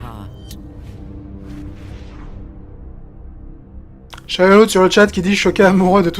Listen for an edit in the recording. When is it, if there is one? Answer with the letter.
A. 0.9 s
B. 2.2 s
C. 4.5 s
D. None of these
C